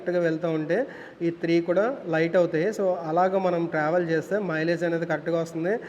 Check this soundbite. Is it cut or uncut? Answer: uncut